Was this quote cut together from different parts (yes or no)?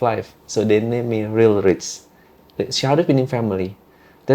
no